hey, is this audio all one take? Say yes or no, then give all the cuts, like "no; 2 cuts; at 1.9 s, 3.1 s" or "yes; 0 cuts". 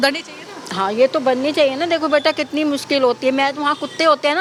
yes; 0 cuts